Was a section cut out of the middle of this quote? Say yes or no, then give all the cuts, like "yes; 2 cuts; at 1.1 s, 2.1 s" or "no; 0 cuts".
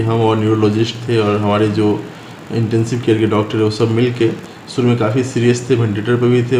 no; 0 cuts